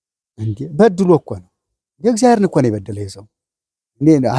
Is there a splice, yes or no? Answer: no